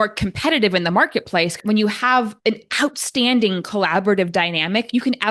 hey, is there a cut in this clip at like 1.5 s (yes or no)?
yes